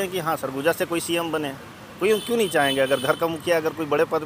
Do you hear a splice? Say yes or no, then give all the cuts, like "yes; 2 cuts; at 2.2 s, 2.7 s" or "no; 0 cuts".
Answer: no; 0 cuts